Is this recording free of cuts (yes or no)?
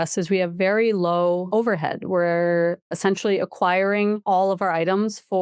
no